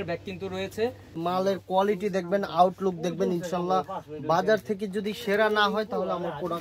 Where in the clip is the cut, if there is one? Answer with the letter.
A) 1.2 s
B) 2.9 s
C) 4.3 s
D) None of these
A